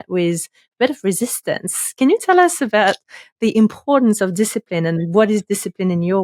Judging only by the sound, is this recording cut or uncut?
uncut